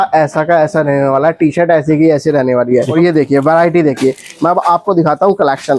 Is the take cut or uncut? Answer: cut